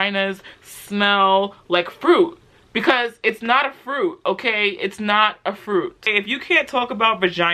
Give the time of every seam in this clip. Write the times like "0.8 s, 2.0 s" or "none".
6.1 s